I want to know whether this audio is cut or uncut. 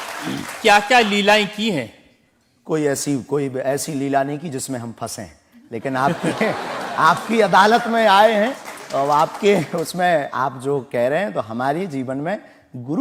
uncut